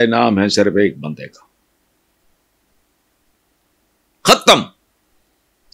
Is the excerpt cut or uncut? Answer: uncut